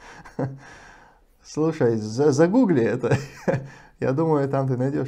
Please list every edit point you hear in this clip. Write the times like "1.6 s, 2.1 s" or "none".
none